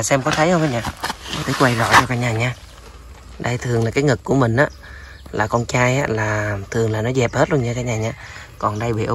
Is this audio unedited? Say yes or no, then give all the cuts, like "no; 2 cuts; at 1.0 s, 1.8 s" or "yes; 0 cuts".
yes; 0 cuts